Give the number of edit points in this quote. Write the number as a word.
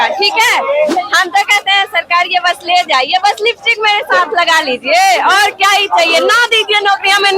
one